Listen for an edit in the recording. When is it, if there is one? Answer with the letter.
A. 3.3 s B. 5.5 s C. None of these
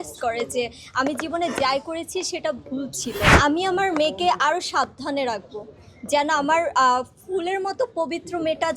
A